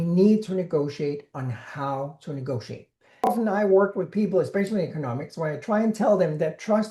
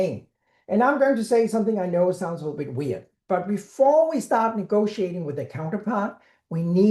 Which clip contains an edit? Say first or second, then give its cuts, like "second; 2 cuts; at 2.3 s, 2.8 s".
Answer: first; 1 cut; at 3.3 s